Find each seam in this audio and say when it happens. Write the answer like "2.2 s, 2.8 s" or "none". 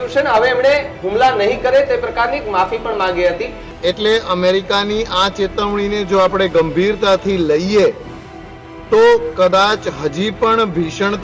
3.6 s